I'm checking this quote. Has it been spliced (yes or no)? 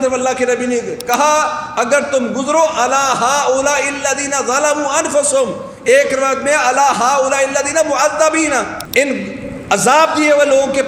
yes